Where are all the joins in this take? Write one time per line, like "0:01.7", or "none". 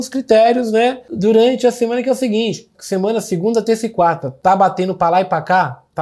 0:01.1
0:02.7
0:04.3